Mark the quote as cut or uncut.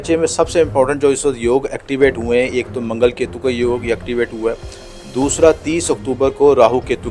uncut